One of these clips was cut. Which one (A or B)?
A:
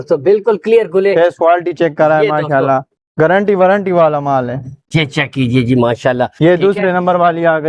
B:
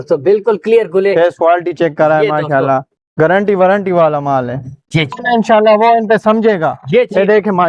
B